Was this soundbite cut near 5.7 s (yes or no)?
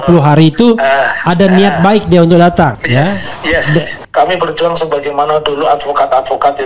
no